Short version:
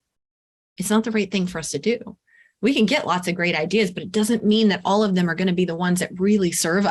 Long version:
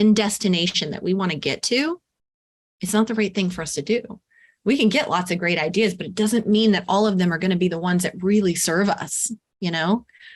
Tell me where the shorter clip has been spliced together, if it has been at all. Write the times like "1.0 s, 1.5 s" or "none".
none